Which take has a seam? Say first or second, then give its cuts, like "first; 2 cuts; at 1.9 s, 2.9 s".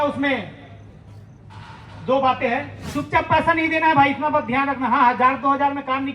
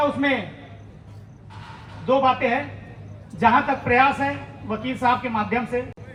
first; 1 cut; at 2.8 s